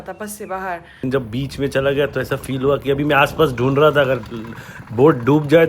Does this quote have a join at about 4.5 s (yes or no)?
no